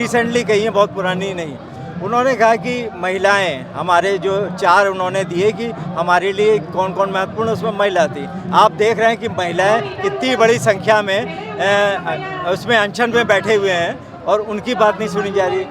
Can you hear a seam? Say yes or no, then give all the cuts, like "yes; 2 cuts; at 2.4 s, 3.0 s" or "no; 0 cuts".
no; 0 cuts